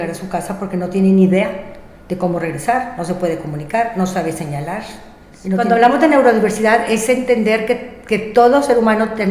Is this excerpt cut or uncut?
cut